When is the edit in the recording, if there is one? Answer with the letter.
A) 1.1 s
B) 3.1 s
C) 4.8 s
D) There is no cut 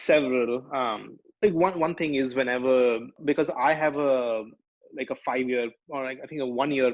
B